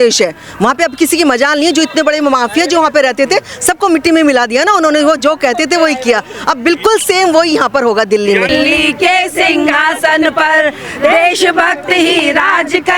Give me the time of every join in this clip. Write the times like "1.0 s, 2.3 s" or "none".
8.5 s

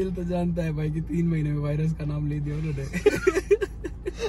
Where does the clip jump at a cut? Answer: none

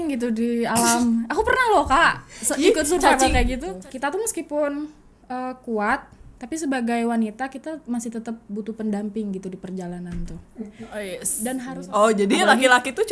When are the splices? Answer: 3.7 s, 11.7 s

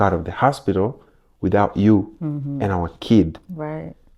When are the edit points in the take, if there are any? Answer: none

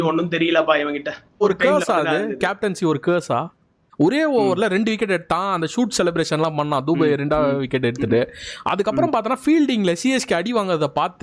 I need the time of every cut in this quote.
1.4 s, 3.8 s

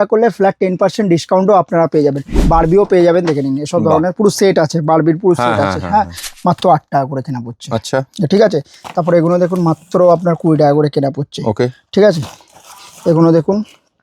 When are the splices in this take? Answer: 2.3 s, 6.2 s

